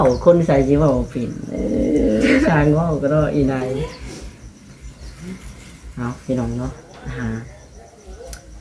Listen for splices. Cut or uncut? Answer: uncut